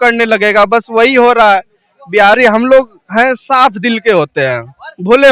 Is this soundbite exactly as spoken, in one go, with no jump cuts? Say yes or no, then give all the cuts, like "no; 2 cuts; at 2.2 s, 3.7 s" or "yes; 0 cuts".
yes; 0 cuts